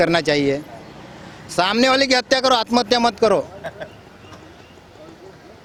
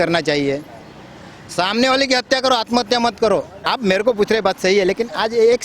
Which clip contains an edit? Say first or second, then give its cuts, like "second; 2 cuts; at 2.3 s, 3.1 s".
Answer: second; 1 cut; at 3.7 s